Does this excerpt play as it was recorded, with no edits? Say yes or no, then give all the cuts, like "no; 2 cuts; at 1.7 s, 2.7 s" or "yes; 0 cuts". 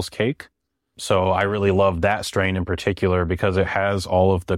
yes; 0 cuts